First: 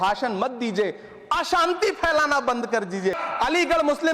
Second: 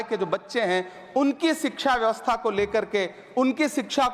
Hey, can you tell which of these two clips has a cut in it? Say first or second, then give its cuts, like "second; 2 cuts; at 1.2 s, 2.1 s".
first; 1 cut; at 3.2 s